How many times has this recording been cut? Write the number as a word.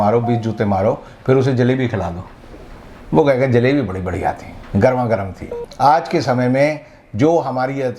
one